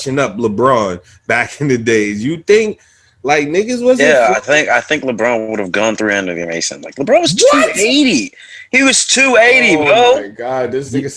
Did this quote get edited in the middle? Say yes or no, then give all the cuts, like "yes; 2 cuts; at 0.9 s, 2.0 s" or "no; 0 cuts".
no; 0 cuts